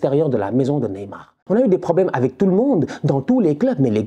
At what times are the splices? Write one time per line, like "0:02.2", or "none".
0:01.4